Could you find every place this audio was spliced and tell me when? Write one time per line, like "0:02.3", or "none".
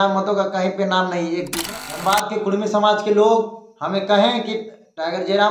0:01.6